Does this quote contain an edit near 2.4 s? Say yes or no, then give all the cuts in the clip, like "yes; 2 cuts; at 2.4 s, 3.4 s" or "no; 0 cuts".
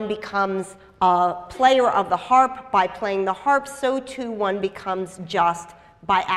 yes; 1 cut; at 2.4 s